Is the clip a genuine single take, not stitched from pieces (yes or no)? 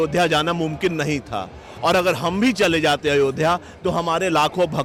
yes